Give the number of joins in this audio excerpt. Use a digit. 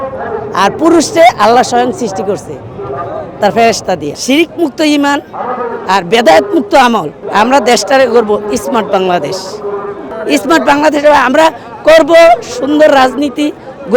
3